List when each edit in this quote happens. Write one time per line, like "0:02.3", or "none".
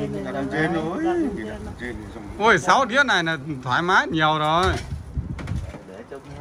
none